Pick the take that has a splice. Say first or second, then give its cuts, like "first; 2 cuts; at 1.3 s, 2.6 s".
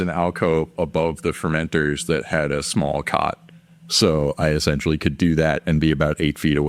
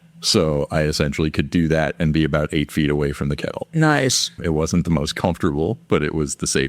second; 1 cut; at 4.4 s